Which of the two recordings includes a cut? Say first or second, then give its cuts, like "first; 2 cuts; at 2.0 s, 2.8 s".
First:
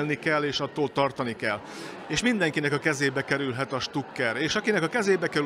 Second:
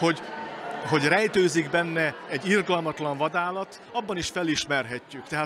second; 1 cut; at 2.2 s